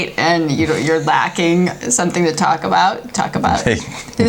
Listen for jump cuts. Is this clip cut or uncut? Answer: uncut